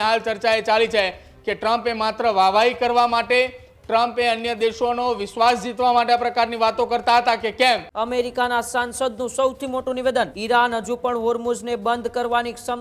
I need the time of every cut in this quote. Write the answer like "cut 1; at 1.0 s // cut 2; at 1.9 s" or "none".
cut 1; at 7.9 s // cut 2; at 10.4 s